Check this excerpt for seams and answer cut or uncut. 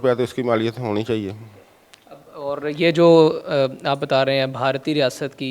uncut